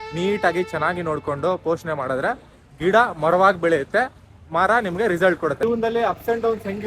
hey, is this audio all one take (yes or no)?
no